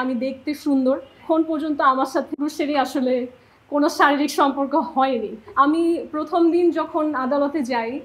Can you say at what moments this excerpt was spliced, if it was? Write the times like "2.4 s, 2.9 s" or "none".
1.2 s, 2.3 s, 5.5 s